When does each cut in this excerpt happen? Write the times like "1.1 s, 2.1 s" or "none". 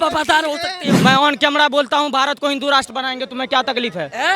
1.0 s